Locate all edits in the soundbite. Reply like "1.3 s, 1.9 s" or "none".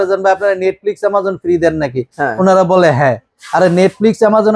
none